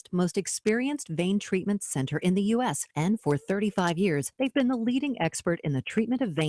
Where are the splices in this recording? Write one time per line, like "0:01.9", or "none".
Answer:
none